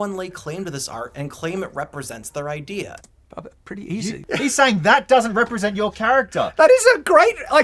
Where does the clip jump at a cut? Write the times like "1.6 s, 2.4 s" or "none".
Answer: 4.2 s